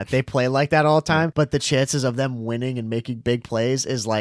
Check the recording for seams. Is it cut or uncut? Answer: cut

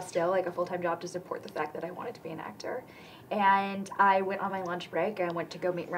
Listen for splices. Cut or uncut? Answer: uncut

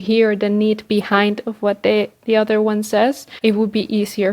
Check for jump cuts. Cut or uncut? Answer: cut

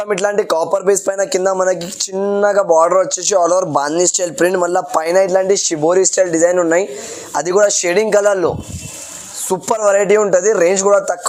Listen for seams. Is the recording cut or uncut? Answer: uncut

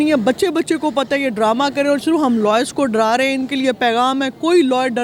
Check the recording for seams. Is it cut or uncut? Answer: uncut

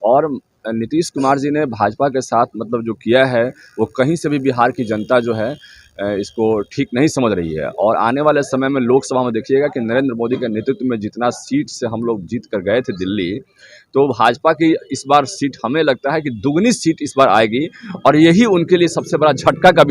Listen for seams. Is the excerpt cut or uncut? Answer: uncut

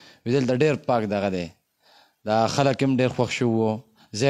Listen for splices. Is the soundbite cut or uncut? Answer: uncut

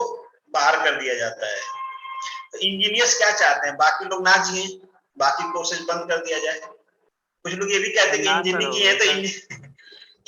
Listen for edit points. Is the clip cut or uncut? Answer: uncut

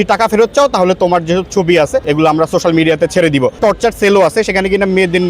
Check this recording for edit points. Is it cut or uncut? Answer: cut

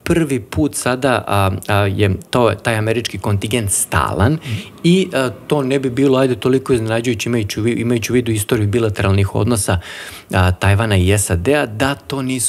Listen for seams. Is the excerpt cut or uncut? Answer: uncut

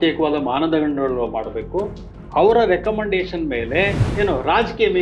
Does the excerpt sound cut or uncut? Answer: cut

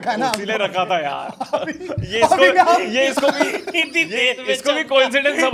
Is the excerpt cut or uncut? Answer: uncut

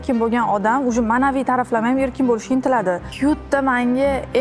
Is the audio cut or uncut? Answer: cut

